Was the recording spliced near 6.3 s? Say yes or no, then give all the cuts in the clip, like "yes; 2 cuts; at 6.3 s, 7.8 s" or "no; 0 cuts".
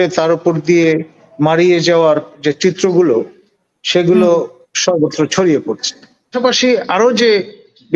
yes; 1 cut; at 6.3 s